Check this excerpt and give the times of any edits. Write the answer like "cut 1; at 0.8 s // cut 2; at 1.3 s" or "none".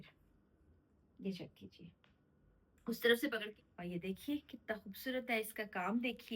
cut 1; at 3.4 s